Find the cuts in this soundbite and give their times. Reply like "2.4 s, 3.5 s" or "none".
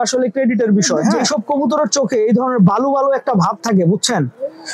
1.1 s